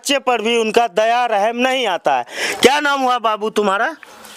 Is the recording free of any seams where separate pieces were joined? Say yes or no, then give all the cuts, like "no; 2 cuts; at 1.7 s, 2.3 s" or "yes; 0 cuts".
yes; 0 cuts